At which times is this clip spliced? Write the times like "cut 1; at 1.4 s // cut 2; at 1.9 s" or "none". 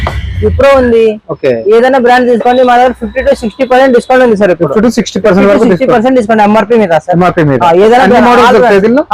none

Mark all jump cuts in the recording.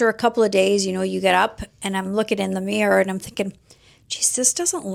none

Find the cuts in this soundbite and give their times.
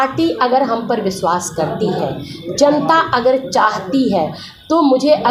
none

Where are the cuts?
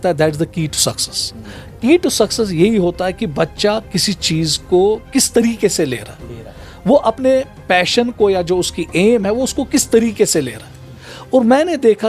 none

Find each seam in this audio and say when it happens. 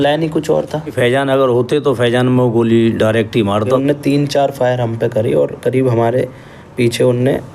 cut 1; at 0.9 s // cut 2; at 3.6 s

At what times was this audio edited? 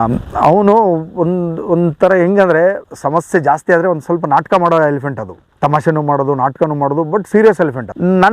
cut 1; at 2.9 s

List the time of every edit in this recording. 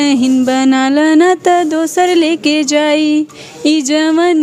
none

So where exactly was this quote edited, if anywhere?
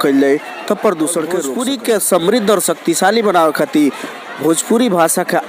cut 1; at 1.5 s

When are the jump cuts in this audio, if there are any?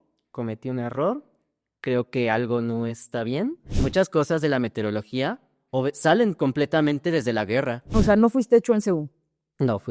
cut 1; at 3.7 s // cut 2; at 7.8 s

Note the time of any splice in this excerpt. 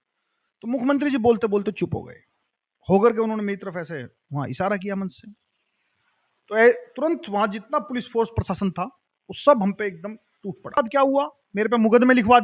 cut 1; at 10.8 s

